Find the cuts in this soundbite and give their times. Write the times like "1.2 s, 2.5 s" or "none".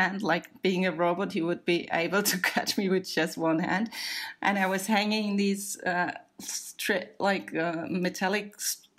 none